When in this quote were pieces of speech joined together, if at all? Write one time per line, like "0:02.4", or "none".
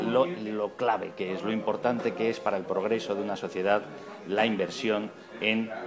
0:01.1